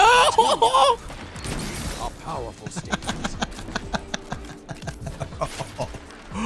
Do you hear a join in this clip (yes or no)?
yes